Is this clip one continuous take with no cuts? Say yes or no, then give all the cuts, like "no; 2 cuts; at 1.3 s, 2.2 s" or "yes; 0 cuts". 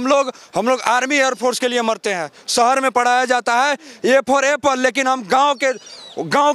yes; 0 cuts